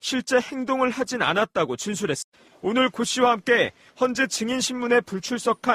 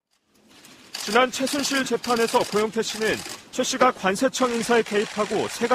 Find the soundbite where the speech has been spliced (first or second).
first